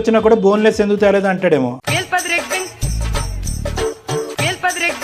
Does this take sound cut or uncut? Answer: uncut